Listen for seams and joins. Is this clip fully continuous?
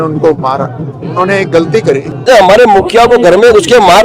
no; 1 cut; at 2.1 s

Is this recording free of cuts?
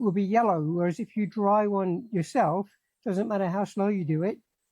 yes; 0 cuts

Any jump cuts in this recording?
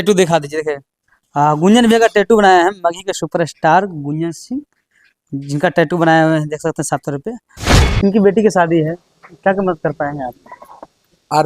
yes; 1 cut; at 7.7 s

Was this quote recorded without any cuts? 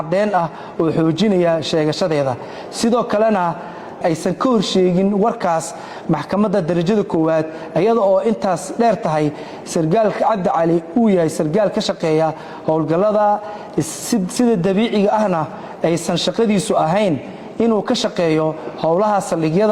yes; 0 cuts

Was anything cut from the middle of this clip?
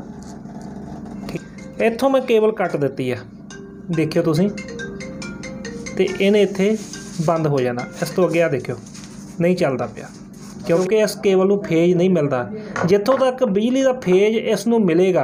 yes; 2 cuts; at 1.2 s, 10.6 s

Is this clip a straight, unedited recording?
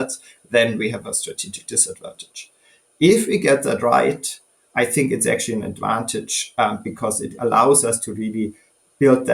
yes; 0 cuts

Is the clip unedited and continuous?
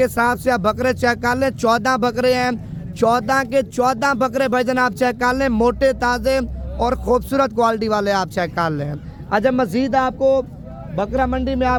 yes; 0 cuts

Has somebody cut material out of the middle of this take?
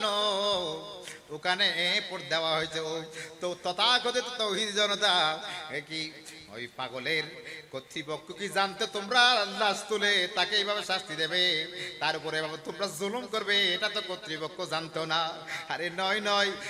no; 0 cuts

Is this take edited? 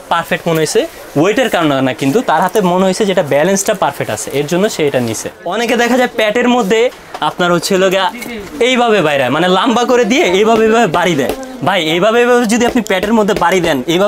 yes; 1 cut; at 5.4 s

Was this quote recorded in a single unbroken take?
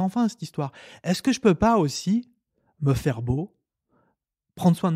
yes; 0 cuts

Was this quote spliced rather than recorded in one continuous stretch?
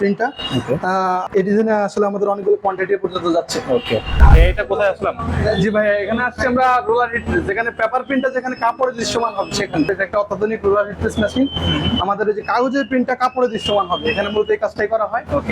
yes; 3 cuts; at 1.2 s, 4.2 s, 9.9 s

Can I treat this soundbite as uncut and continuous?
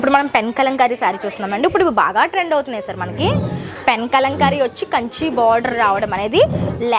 yes; 0 cuts

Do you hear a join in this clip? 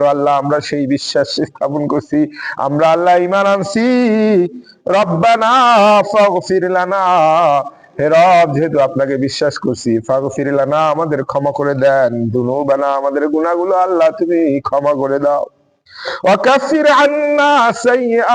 no; 0 cuts

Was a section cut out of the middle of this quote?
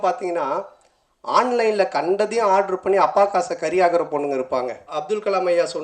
yes; 1 cut; at 4.9 s

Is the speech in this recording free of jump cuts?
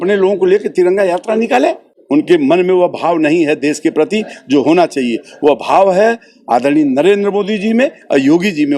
no; 1 cut; at 1.9 s

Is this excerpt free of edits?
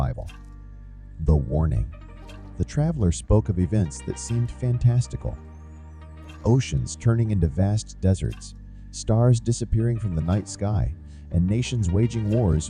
yes; 0 cuts

